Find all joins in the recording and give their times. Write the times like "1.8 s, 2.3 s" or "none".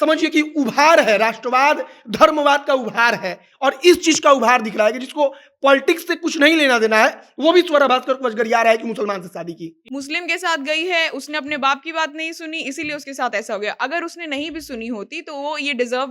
9.8 s